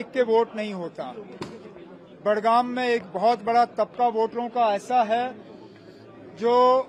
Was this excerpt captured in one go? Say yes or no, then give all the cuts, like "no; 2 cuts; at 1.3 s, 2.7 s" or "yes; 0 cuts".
yes; 0 cuts